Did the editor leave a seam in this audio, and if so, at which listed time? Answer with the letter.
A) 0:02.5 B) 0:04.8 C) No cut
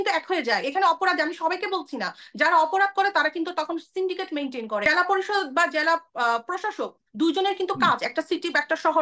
B